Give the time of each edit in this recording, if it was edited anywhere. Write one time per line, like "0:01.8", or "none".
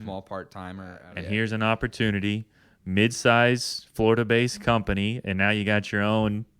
0:01.0